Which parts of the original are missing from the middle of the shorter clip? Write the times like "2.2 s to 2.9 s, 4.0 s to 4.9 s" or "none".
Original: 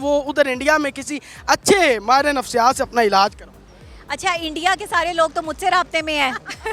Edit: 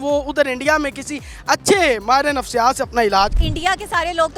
3.5 s to 4.5 s